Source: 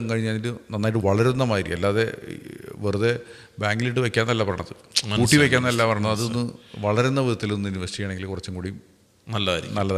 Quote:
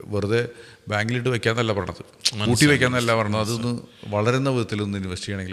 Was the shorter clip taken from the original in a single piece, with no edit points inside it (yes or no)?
yes